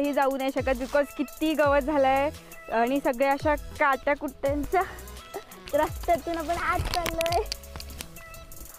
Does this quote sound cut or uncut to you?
uncut